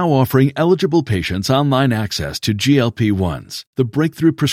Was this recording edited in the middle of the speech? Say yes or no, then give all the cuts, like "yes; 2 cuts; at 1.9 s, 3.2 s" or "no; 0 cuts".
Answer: no; 0 cuts